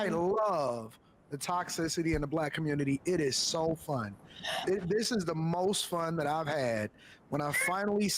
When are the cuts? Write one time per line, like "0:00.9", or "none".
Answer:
none